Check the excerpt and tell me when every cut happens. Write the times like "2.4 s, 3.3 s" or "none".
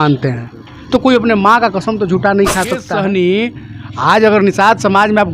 2.9 s

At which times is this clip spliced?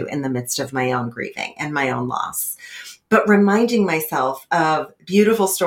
none

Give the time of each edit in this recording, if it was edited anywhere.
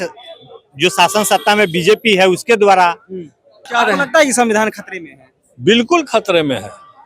3.7 s

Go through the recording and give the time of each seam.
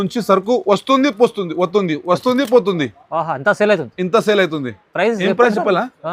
none

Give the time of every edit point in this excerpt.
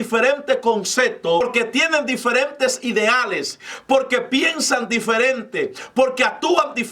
1.4 s

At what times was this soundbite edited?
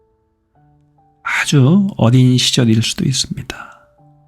1.2 s

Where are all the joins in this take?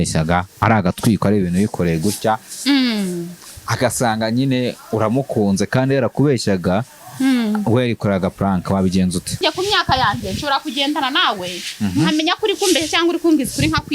9.4 s

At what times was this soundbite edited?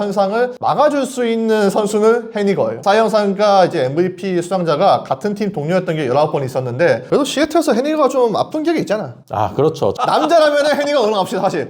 2.8 s, 7.0 s

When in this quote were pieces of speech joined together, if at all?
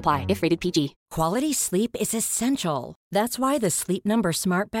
1.0 s

